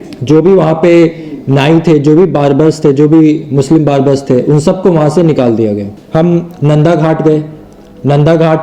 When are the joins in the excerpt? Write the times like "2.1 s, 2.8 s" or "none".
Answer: 5.9 s